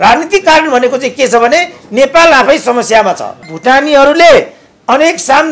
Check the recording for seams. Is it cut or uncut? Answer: cut